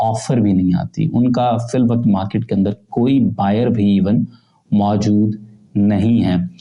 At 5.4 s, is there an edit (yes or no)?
no